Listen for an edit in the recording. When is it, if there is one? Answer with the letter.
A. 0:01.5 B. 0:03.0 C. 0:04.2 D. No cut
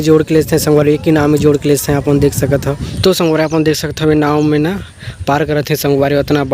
B